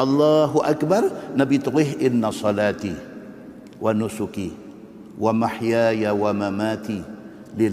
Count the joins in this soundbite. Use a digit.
0